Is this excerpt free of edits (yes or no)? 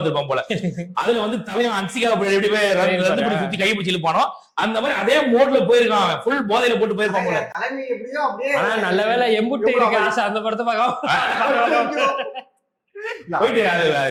yes